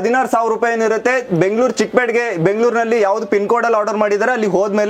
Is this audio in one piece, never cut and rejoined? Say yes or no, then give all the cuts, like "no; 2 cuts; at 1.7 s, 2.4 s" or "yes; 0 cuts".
yes; 0 cuts